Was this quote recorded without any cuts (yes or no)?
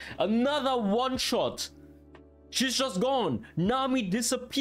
yes